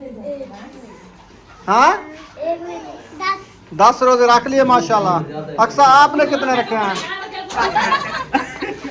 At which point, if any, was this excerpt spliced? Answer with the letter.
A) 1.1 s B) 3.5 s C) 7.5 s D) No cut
C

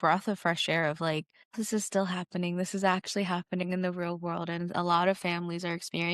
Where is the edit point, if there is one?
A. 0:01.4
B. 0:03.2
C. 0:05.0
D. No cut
A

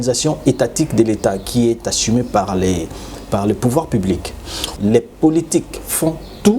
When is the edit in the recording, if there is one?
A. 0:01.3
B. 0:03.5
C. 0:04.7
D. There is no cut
C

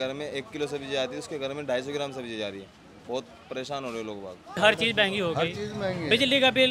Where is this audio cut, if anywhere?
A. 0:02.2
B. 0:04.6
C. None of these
B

